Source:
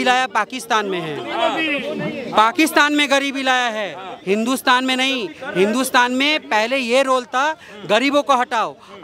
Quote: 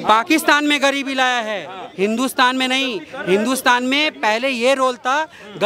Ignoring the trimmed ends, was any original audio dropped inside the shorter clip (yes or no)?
no